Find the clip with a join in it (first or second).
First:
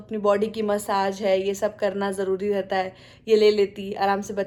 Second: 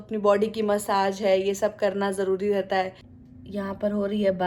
second